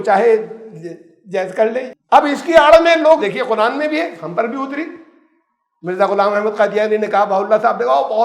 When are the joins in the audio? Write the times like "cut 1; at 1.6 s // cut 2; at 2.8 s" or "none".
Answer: cut 1; at 1.9 s // cut 2; at 3.2 s